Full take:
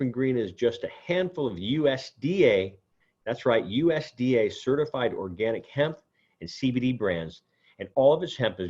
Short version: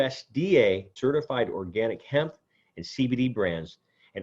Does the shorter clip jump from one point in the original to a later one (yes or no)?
yes